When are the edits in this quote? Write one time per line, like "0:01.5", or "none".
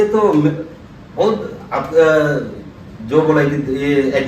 none